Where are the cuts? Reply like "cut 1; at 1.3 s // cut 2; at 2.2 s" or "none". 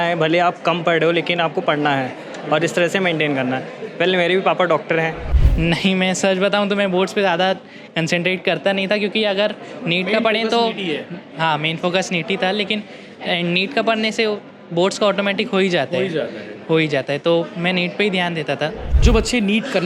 cut 1; at 5.3 s // cut 2; at 18.9 s